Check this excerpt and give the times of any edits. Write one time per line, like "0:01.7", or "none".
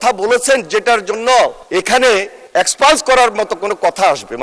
0:01.6
0:02.4